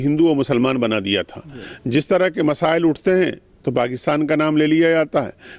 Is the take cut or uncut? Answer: uncut